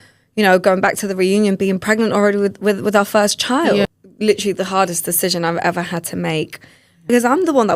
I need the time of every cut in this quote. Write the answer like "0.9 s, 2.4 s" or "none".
3.9 s, 7.1 s

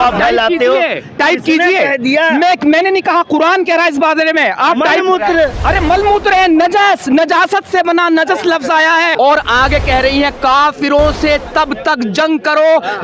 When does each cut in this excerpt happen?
9.1 s

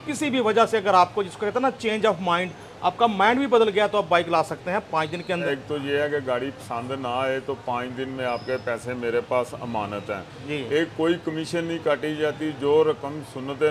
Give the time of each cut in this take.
5.5 s

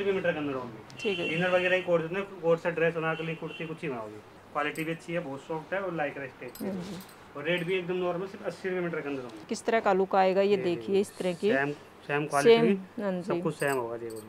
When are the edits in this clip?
4.4 s, 9.5 s

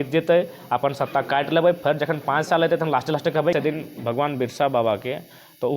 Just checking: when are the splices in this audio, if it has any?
3.5 s

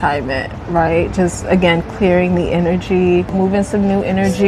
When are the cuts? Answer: 3.3 s

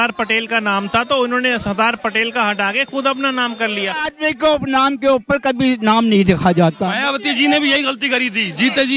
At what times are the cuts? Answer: 4.1 s, 6.8 s

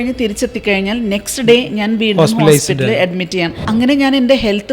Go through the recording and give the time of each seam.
3.7 s

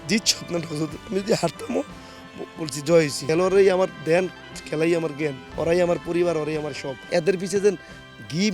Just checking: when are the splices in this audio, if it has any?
3.2 s, 7.0 s

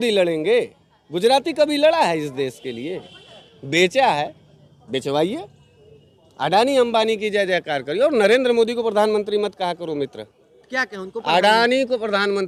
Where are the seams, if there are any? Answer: none

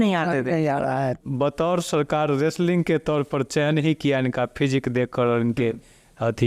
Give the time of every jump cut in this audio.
1.2 s

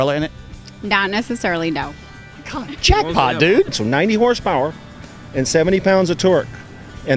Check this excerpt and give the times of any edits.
3.8 s

